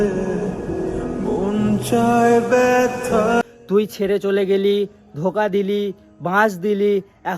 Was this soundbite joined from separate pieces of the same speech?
yes; 1 cut; at 3.4 s

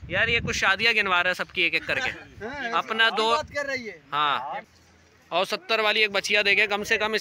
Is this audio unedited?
no; 1 cut; at 4.6 s

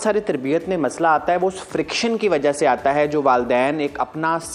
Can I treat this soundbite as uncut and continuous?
yes; 0 cuts

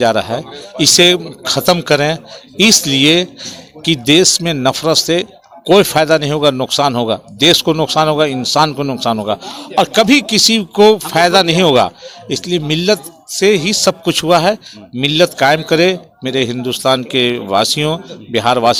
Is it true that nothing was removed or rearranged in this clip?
yes; 0 cuts

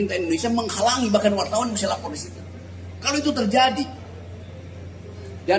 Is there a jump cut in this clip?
no; 0 cuts

